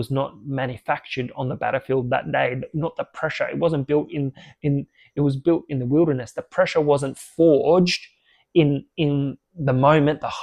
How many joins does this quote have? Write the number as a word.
zero